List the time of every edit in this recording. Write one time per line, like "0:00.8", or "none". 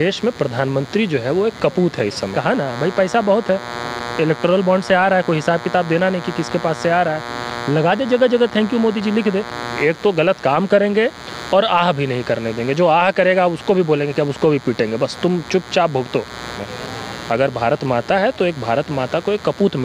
0:02.4
0:09.7
0:16.6